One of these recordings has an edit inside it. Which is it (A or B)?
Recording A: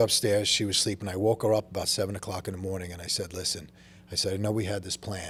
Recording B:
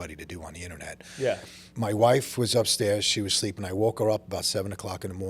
B